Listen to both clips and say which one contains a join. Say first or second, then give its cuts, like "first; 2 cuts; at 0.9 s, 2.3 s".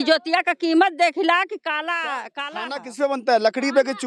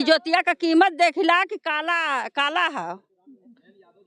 first; 1 cut; at 2.4 s